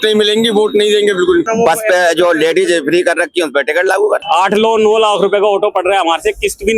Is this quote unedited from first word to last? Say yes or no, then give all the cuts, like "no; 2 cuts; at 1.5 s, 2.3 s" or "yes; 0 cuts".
no; 2 cuts; at 1.5 s, 4.2 s